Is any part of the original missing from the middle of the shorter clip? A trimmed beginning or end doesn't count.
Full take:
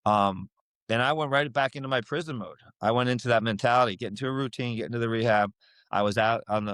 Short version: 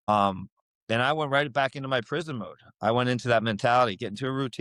no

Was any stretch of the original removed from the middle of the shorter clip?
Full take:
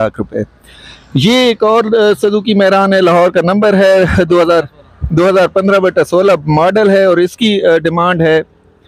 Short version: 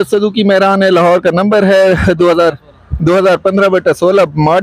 no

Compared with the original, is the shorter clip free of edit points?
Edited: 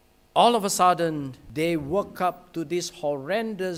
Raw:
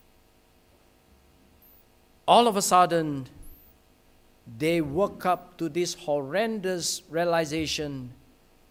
no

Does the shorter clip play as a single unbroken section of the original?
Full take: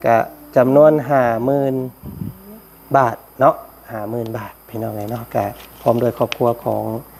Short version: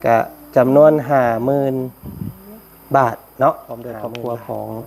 no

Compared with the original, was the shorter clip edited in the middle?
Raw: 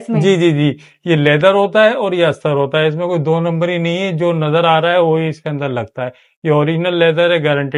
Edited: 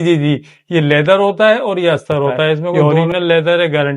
yes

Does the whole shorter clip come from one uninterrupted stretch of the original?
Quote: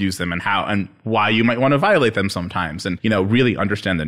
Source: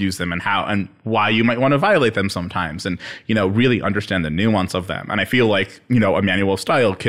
no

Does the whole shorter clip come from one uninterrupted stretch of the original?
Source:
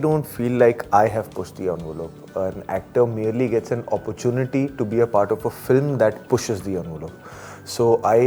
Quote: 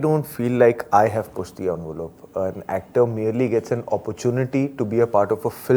yes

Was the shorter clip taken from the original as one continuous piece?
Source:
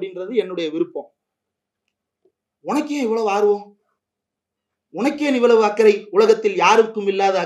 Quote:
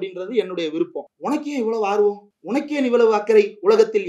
no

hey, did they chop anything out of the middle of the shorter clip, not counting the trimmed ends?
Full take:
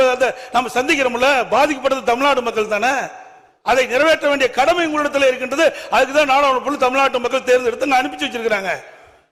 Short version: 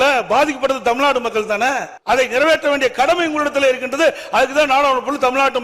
yes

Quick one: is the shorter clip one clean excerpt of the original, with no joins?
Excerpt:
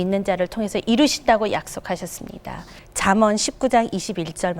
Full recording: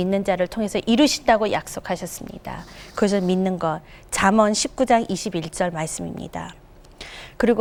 no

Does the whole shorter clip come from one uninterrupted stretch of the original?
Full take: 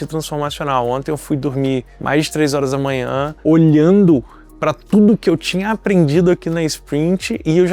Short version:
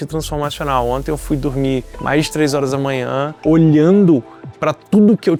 yes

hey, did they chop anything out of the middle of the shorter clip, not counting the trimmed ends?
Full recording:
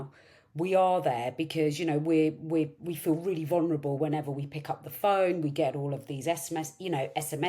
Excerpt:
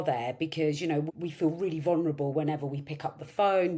yes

